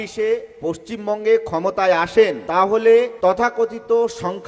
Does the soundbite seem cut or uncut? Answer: cut